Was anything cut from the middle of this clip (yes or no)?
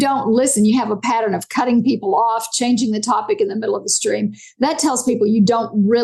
no